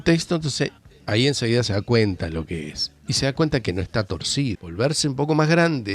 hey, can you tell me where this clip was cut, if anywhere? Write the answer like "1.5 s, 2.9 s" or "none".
4.6 s

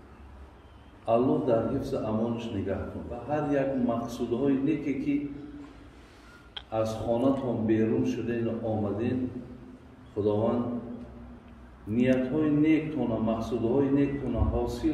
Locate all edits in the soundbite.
3.2 s

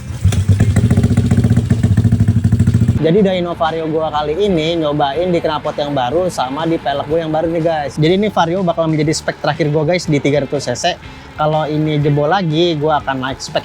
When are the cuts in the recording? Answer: 3.0 s, 7.9 s

